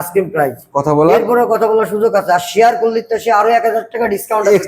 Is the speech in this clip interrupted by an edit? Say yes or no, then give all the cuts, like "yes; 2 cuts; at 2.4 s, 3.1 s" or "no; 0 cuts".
no; 0 cuts